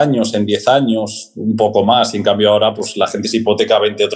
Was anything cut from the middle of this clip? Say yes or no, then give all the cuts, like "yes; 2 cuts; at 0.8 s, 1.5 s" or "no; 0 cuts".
no; 0 cuts